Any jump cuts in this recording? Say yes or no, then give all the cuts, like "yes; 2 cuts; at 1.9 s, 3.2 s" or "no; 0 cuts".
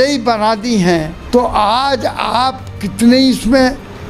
yes; 1 cut; at 1.2 s